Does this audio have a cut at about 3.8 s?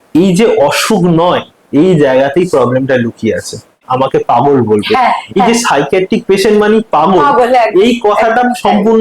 yes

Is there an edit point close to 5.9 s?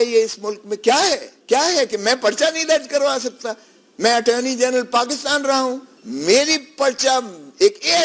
yes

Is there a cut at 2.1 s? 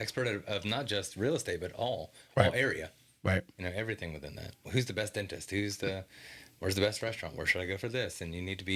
no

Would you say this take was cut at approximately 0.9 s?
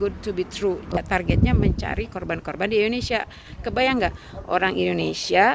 yes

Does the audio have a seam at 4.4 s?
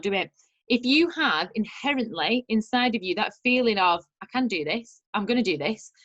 no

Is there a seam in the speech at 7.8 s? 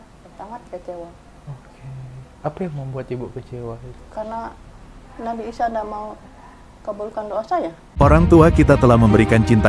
yes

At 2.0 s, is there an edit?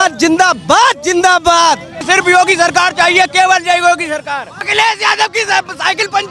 yes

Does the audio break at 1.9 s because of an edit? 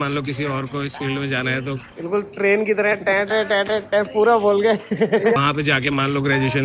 yes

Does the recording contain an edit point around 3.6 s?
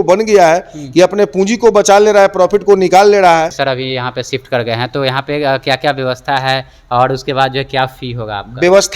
yes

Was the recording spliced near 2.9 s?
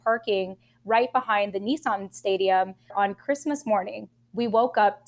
yes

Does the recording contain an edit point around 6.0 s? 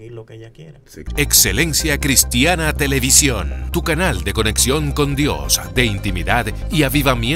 no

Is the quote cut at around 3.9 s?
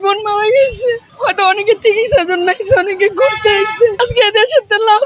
yes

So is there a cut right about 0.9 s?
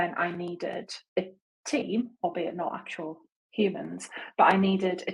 yes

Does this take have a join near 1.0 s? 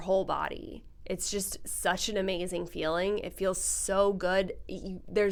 no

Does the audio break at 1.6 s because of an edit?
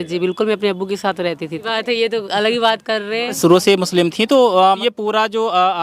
yes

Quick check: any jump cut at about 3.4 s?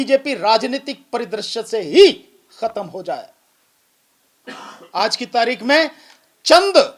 no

